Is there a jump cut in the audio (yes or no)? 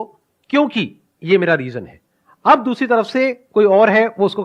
no